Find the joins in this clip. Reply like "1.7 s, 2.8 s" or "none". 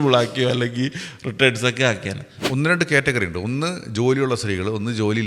2.3 s